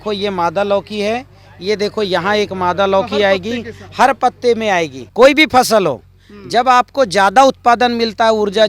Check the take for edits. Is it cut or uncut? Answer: cut